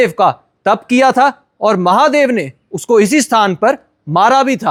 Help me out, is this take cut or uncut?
uncut